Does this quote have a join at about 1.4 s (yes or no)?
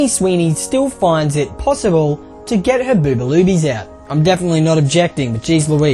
no